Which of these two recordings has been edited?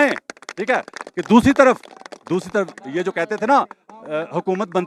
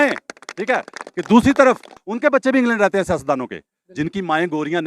second; 1 cut; at 2.0 s

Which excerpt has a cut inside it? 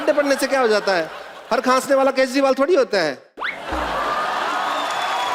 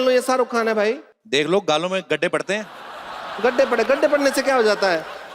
second; 1 cut; at 1.1 s

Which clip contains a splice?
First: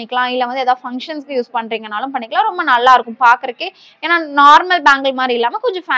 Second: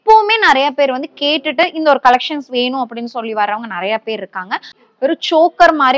second; 1 cut; at 4.7 s

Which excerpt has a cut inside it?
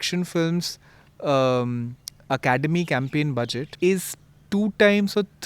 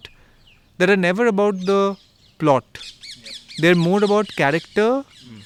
first; 1 cut; at 3.7 s

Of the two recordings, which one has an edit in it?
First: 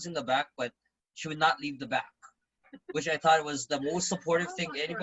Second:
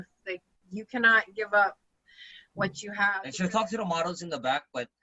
second; 1 cut; at 3.3 s

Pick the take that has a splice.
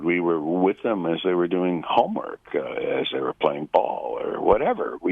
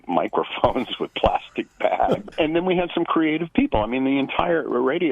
second; 1 cut; at 2.2 s

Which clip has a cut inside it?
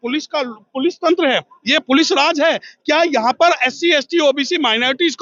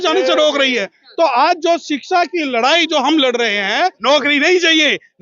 second; 1 cut; at 4.0 s

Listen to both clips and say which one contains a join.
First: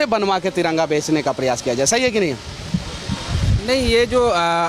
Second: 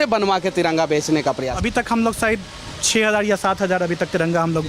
second; 1 cut; at 1.5 s

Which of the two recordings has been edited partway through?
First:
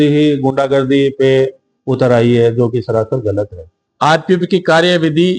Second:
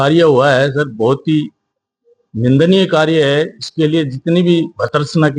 first; 1 cut; at 3.8 s

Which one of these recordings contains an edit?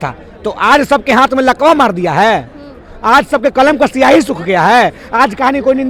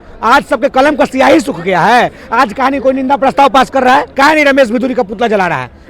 second; 1 cut; at 4.1 s

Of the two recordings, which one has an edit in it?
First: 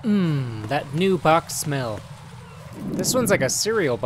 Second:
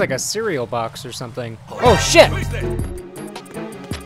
second; 1 cut; at 2.3 s

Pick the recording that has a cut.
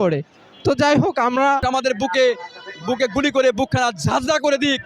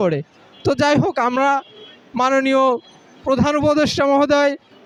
first; 1 cut; at 1.6 s

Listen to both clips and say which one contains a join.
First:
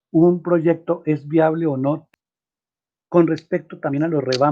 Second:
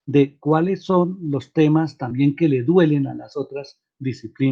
first; 1 cut; at 2.0 s

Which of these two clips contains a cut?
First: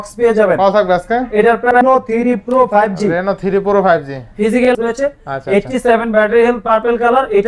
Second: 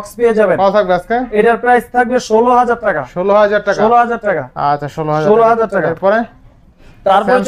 first; 2 cuts; at 1.8 s, 4.7 s

